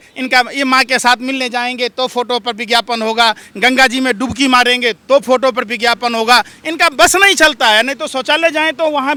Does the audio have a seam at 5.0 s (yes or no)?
no